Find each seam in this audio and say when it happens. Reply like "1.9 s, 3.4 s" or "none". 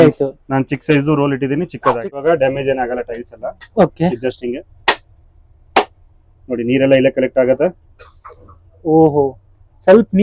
2.2 s